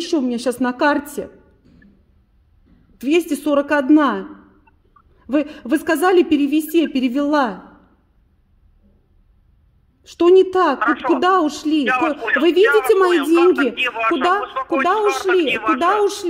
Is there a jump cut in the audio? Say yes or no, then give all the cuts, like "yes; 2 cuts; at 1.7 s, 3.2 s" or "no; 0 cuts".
no; 0 cuts